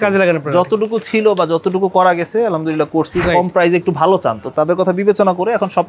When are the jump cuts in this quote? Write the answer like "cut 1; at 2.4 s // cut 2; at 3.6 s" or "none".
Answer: cut 1; at 3.2 s // cut 2; at 4.5 s